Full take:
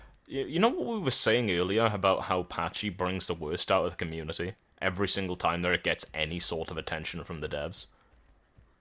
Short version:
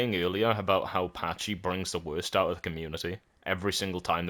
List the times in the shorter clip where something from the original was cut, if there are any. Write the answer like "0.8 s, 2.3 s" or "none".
none